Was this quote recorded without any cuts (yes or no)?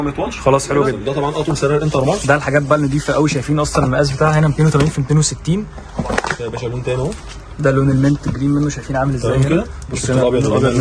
no